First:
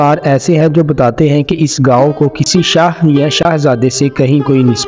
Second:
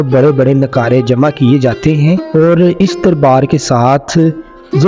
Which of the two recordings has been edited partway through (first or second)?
second